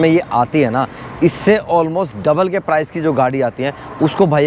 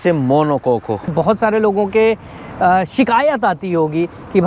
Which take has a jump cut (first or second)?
second